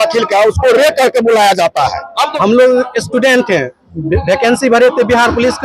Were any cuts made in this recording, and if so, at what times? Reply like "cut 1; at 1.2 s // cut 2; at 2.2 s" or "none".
cut 1; at 2.3 s